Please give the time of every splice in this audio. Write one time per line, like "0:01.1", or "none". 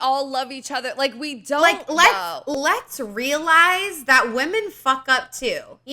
0:02.5